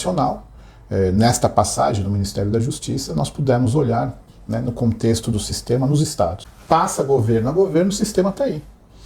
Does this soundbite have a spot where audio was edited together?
yes; 1 cut; at 6.5 s

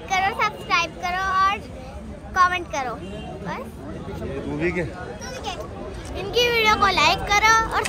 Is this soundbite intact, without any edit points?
yes; 0 cuts

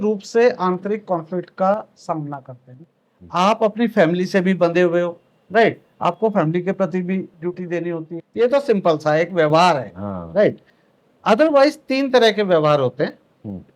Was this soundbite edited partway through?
yes; 2 cuts; at 2.8 s, 8.1 s

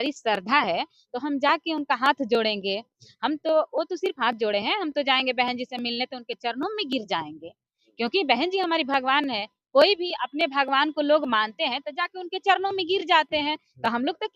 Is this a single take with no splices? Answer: yes; 0 cuts

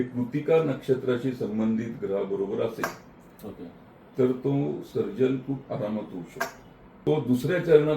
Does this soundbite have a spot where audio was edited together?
yes; 1 cut; at 7.0 s

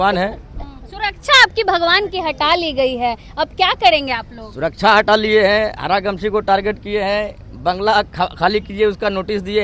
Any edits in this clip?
no; 0 cuts

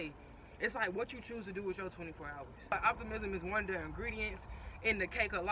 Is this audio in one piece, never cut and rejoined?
no; 1 cut; at 2.7 s

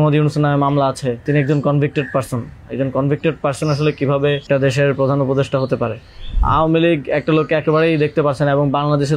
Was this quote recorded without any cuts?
no; 3 cuts; at 1.2 s, 4.4 s, 6.4 s

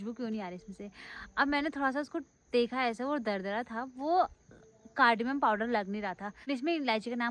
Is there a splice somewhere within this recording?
no; 0 cuts

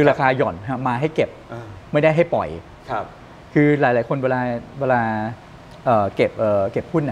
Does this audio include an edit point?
no; 0 cuts

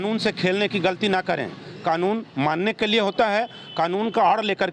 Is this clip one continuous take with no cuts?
yes; 0 cuts

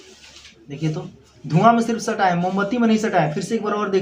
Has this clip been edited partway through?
no; 0 cuts

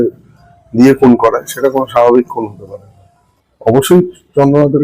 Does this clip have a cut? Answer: yes; 1 cut; at 3.5 s

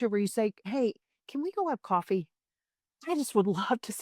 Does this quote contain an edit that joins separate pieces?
no; 0 cuts

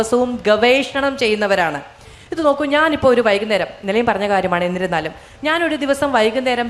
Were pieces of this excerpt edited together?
no; 0 cuts

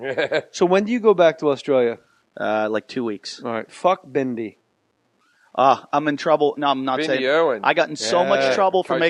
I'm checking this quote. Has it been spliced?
no; 0 cuts

